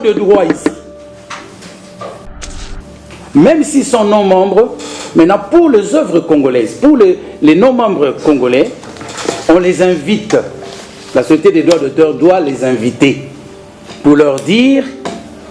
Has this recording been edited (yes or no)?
yes